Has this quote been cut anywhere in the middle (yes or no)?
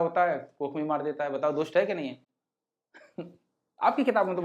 no